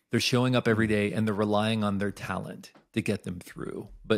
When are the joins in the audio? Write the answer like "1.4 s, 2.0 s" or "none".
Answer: none